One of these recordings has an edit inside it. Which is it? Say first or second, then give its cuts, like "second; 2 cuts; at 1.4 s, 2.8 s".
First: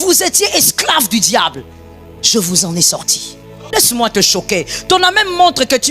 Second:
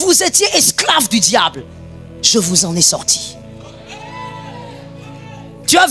first; 1 cut; at 3.7 s